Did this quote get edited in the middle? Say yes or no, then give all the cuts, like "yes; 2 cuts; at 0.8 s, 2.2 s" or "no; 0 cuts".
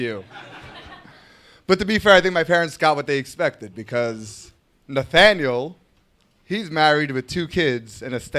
no; 0 cuts